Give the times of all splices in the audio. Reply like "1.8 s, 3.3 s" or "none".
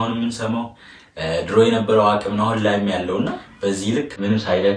3.4 s

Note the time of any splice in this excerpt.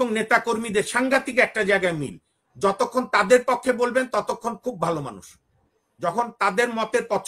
none

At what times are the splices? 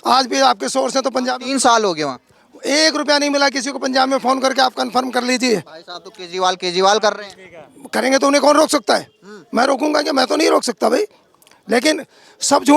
none

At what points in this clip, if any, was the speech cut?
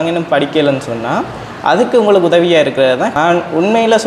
3.1 s

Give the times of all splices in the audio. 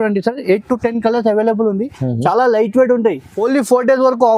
3.4 s

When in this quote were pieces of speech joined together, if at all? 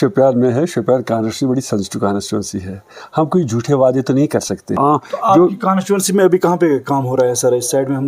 4.8 s

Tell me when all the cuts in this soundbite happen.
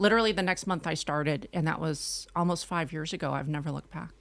none

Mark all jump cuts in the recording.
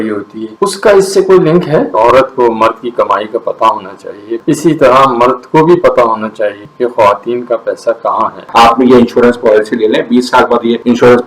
1.9 s, 4.4 s, 6.6 s, 8.5 s

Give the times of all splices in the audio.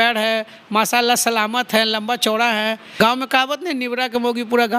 2.9 s

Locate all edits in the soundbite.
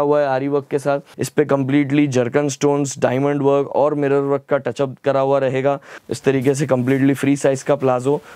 1.2 s, 5.9 s

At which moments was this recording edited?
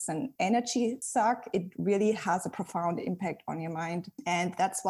1.2 s

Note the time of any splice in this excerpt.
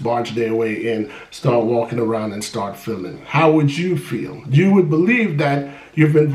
none

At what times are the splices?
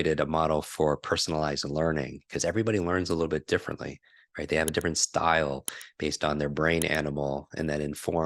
none

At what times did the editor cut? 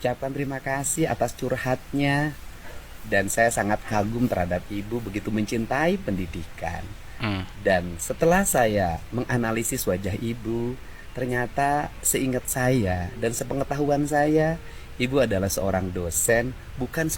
none

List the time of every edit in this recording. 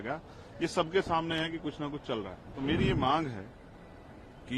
2.4 s

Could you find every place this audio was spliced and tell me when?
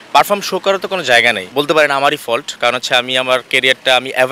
1.4 s

